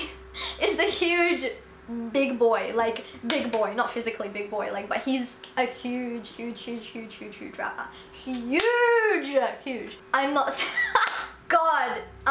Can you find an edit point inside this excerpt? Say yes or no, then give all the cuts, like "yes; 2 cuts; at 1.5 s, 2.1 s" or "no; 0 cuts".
yes; 1 cut; at 11.4 s